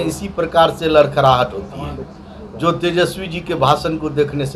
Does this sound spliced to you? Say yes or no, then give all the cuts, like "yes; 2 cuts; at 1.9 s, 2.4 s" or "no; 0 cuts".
no; 0 cuts